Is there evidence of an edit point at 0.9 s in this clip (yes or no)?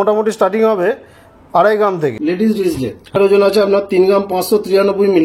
no